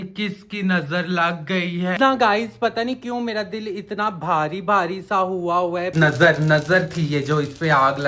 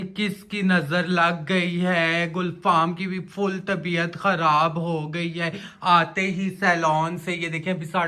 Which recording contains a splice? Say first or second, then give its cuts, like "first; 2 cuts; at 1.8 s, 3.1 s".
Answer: first; 2 cuts; at 2.0 s, 5.9 s